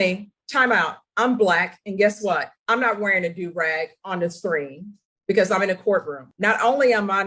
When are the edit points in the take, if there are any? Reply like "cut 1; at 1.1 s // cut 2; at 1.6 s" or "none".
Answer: none